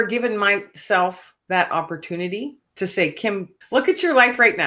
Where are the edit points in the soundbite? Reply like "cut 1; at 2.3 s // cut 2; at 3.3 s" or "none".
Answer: cut 1; at 1.3 s // cut 2; at 2.6 s // cut 3; at 3.6 s